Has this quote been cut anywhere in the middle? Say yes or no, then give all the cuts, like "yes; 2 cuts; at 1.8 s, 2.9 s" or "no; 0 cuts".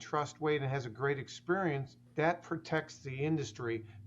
yes; 1 cut; at 2.0 s